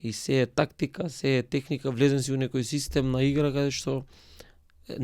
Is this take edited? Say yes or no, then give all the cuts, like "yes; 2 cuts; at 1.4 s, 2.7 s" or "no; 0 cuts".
no; 0 cuts